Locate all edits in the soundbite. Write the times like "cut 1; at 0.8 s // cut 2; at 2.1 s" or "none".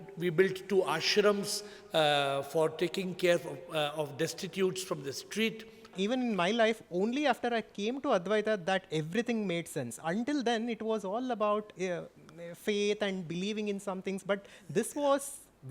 cut 1; at 5.9 s